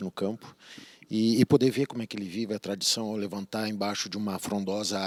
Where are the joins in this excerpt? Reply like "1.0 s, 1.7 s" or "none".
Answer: none